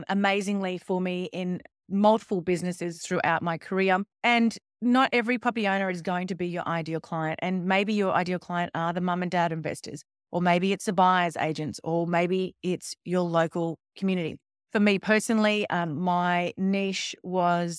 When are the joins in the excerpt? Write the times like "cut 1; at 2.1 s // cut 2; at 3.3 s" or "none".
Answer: cut 1; at 4.1 s